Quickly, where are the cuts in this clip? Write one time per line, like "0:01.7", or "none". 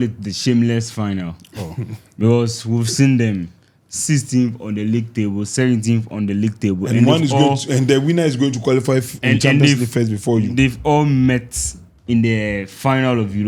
none